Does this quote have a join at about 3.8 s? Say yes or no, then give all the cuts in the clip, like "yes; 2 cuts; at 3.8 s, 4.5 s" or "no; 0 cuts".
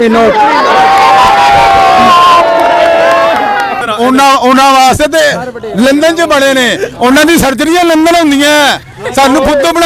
yes; 1 cut; at 3.8 s